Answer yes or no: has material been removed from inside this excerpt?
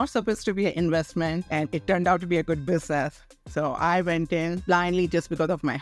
yes